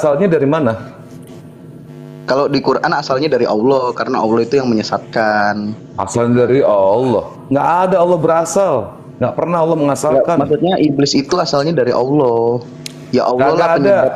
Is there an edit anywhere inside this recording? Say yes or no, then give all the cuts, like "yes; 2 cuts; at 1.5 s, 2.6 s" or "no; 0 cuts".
no; 0 cuts